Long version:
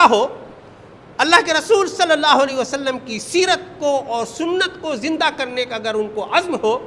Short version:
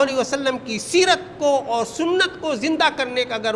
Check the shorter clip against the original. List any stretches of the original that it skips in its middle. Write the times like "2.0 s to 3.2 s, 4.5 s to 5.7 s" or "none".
none